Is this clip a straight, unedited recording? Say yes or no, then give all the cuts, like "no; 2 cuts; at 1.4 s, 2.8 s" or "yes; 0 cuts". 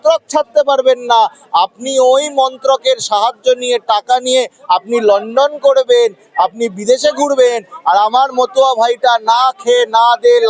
yes; 0 cuts